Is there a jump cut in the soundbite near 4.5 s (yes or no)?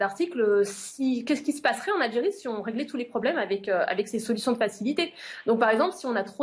no